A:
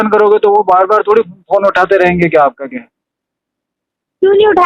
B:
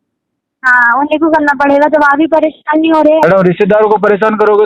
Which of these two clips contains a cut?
B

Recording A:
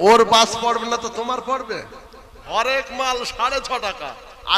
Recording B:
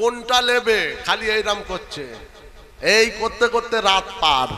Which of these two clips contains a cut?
A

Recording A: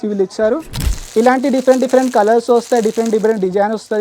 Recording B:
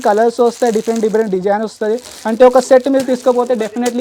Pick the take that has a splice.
A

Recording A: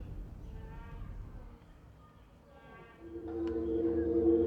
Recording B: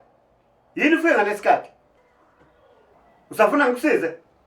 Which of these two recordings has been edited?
B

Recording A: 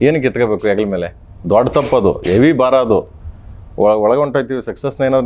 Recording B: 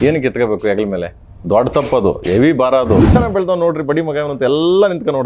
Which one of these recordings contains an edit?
B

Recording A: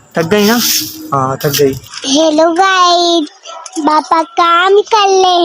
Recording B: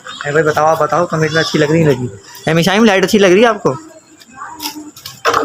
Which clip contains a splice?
A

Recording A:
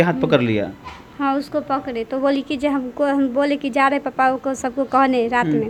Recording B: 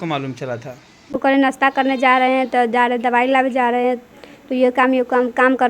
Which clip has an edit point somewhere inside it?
B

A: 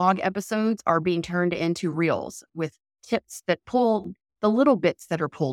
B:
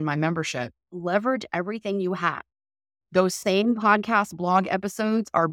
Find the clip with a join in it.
A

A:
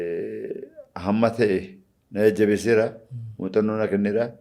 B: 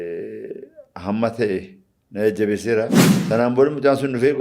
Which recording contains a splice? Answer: B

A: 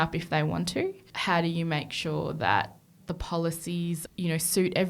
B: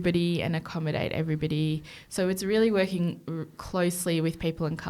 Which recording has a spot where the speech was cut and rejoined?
A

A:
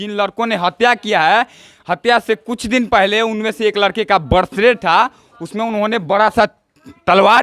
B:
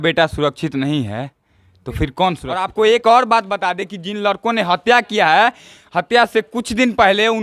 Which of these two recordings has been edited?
B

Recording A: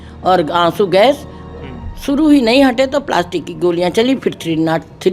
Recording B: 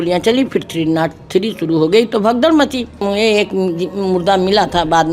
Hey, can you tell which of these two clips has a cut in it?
B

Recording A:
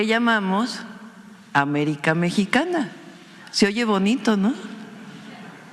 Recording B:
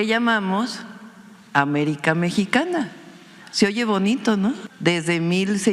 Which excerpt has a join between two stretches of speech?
B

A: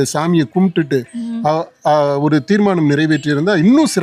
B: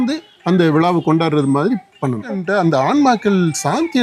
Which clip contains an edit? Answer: B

